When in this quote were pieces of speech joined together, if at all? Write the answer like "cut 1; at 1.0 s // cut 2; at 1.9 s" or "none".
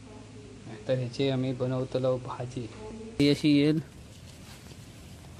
cut 1; at 3.2 s